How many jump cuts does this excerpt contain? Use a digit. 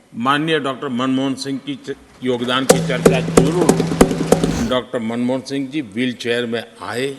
1